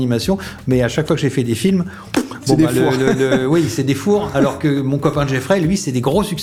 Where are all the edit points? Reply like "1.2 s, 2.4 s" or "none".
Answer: none